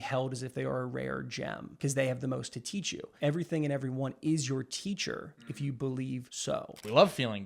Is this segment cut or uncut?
cut